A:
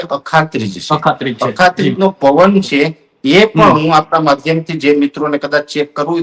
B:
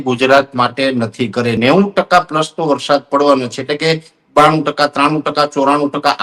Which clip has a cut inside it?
B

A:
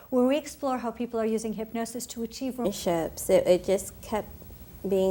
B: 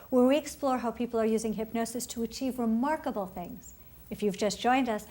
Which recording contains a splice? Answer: B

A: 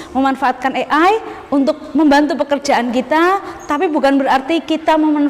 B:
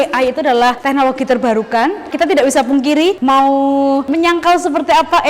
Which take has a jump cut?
B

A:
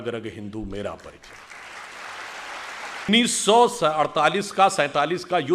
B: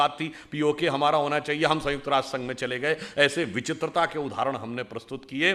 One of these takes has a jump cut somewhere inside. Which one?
A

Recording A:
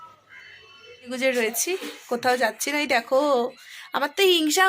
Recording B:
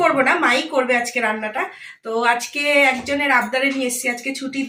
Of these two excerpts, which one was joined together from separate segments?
A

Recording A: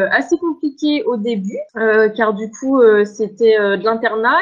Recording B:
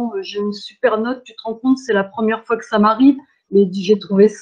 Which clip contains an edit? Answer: A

